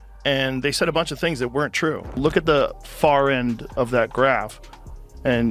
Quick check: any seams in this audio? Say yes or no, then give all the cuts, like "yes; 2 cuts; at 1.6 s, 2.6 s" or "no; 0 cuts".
yes; 1 cut; at 2.2 s